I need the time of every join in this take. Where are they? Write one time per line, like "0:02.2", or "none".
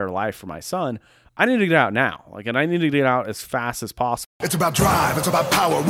0:04.5